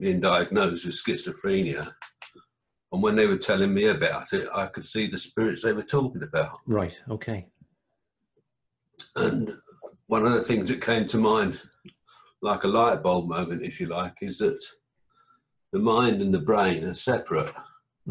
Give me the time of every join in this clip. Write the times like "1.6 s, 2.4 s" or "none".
none